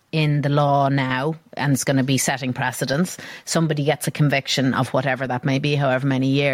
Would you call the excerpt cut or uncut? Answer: uncut